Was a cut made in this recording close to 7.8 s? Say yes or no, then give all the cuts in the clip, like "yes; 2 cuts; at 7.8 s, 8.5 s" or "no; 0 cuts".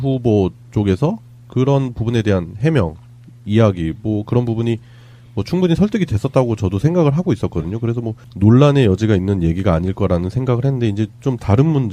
no; 1 cut; at 6.1 s